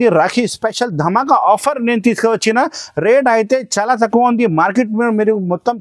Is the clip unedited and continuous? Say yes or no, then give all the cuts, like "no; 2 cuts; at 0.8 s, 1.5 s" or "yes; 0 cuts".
yes; 0 cuts